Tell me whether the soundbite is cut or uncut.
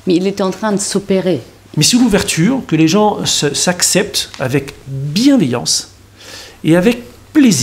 cut